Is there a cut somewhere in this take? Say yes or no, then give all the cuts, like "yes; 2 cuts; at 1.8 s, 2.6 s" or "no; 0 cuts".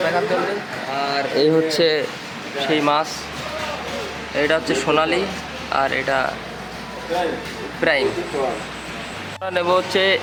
no; 0 cuts